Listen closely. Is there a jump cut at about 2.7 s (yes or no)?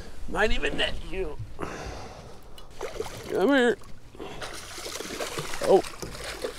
yes